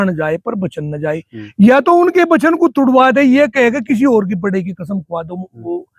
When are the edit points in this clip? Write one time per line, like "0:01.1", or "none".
none